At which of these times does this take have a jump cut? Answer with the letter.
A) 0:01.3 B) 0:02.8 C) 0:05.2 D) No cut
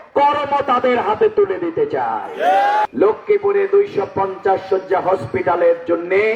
B